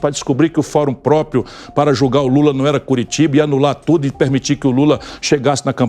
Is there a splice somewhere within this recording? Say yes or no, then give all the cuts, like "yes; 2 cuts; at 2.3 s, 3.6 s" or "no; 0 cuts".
no; 0 cuts